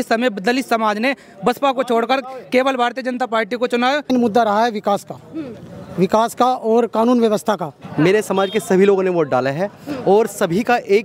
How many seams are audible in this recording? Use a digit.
2